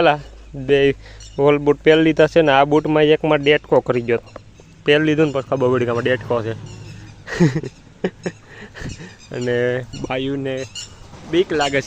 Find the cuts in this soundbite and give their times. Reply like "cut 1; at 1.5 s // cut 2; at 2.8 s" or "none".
none